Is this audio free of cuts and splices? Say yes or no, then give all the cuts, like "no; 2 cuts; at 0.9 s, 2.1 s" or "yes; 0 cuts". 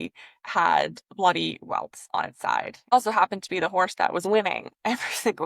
no; 1 cut; at 2.9 s